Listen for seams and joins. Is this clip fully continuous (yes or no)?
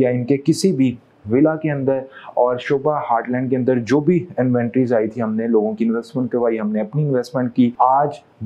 yes